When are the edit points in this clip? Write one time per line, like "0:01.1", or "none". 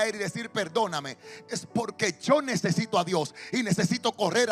none